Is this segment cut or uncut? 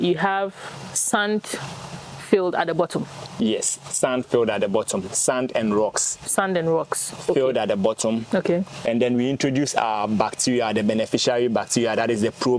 uncut